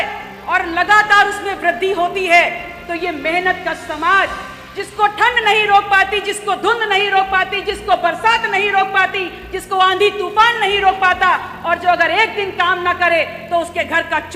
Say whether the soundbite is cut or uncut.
uncut